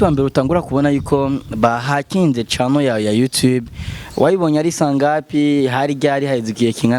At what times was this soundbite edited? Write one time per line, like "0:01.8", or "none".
none